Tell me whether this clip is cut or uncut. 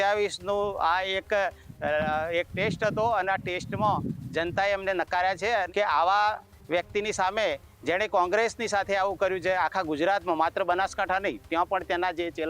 cut